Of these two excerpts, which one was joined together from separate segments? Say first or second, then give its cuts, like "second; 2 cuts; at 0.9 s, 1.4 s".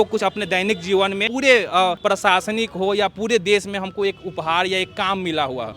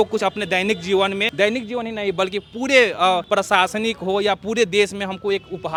first; 1 cut; at 1.3 s